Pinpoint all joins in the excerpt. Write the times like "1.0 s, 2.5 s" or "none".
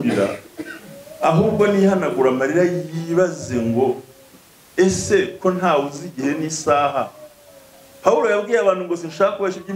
none